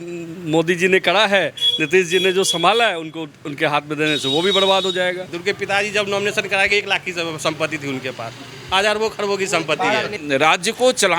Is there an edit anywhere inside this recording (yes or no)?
yes